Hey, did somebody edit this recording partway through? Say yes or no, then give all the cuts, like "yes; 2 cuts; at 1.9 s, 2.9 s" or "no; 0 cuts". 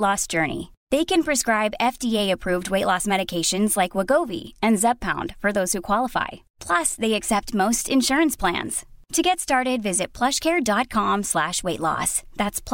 no; 0 cuts